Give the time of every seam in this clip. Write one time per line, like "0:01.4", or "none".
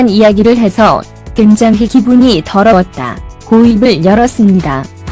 0:03.7